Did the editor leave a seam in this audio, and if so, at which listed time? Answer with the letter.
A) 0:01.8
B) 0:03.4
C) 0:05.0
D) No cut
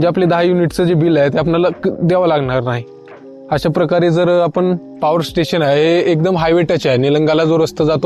C